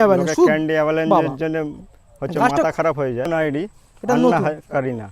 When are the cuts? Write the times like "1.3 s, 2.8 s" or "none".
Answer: 3.3 s